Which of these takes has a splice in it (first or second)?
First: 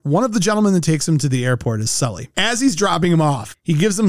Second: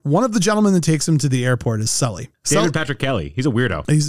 first